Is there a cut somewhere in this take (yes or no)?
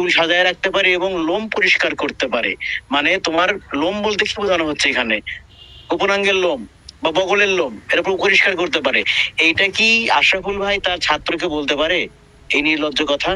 no